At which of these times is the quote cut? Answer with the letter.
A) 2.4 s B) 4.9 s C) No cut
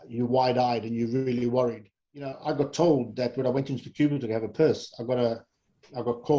A